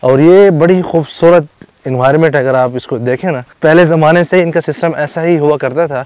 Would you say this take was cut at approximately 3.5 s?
yes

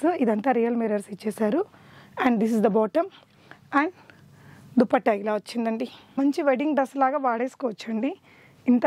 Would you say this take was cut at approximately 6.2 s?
yes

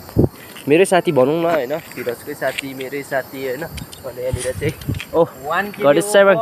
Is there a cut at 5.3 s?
no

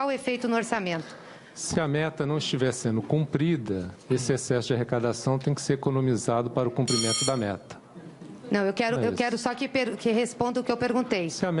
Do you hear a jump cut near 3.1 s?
yes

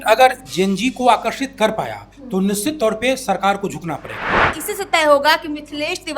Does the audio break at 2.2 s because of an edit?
no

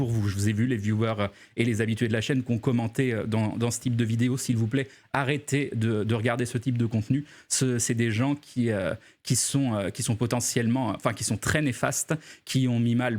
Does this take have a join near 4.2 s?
yes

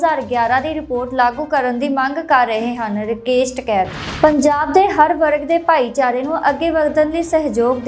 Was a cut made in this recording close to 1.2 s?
no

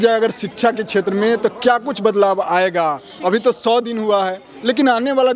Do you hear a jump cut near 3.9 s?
no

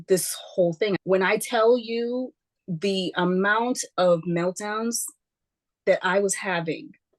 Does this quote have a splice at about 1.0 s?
yes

